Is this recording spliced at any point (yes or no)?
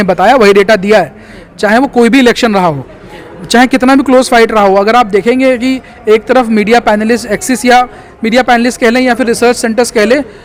no